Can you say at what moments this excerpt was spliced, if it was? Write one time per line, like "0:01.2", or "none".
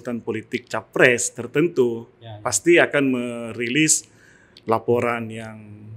none